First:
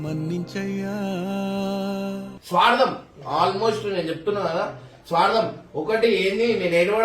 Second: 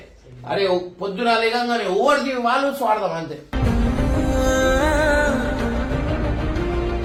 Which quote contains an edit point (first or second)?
first